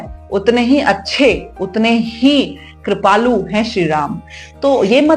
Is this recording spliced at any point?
no; 0 cuts

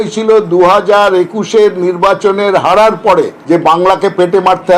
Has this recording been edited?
yes; 1 cut; at 3.4 s

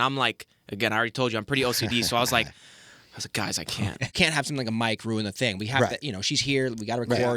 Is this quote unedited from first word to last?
no; 1 cut; at 4.1 s

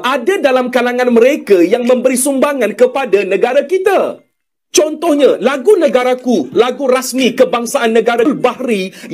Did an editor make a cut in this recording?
no; 0 cuts

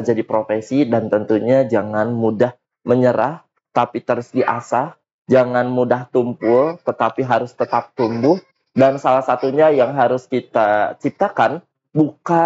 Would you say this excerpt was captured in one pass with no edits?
yes; 0 cuts

